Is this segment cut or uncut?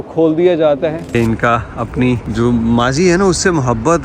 cut